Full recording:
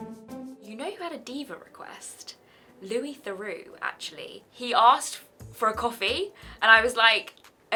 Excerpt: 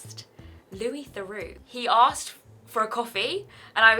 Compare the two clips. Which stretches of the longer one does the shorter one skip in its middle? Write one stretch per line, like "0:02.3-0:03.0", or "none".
0:03.7-0:04.5